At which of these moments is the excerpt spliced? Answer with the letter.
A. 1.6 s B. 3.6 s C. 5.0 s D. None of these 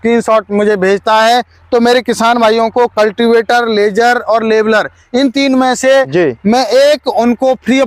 D